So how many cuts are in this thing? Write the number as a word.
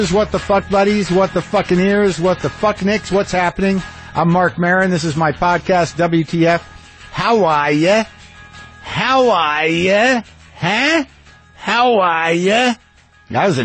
zero